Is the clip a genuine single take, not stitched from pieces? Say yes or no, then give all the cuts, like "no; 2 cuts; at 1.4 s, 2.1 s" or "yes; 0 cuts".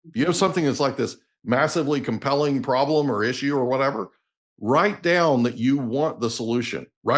yes; 0 cuts